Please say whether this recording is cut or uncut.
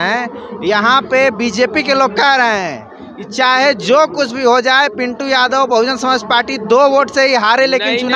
uncut